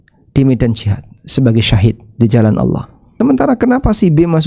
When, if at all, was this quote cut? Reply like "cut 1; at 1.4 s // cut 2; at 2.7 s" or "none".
cut 1; at 3.1 s